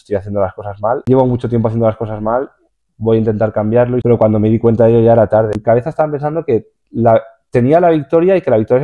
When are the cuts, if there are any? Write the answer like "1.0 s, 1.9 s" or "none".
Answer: 1.0 s, 4.0 s, 5.6 s

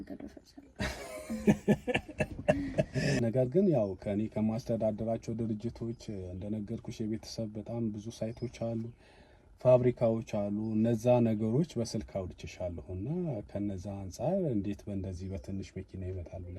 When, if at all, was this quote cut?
3.2 s

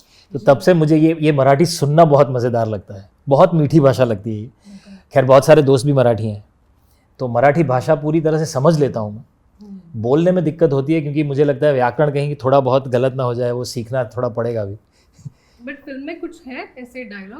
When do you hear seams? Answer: none

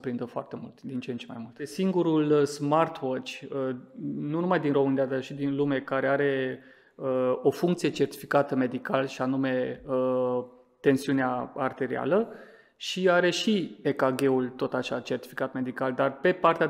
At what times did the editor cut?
1.7 s

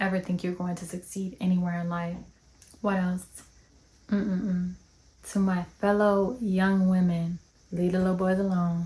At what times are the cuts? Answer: none

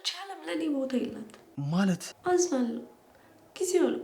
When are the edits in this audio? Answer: 1.9 s

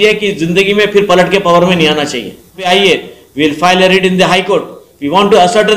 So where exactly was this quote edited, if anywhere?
2.6 s

